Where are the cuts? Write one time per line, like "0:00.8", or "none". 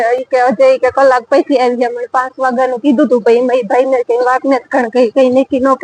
none